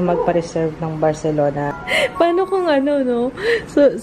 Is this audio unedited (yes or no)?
no